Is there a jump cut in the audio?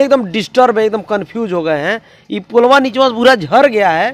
no; 0 cuts

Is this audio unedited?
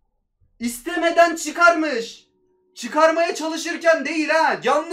yes; 0 cuts

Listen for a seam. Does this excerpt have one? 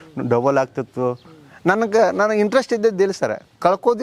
no; 0 cuts

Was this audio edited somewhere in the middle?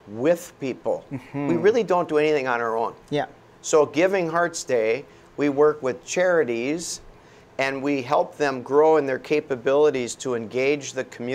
no; 0 cuts

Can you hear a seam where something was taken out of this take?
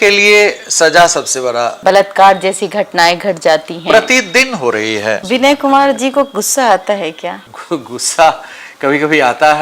yes; 3 cuts; at 1.8 s, 5.2 s, 7.5 s

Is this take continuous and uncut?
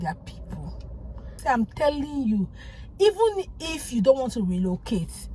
no; 1 cut; at 1.3 s

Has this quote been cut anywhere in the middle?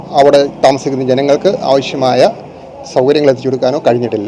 no; 0 cuts

